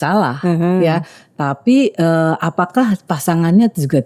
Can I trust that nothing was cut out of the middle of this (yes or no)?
yes